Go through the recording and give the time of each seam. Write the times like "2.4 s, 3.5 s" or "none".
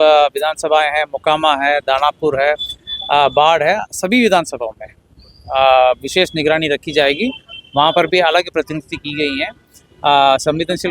none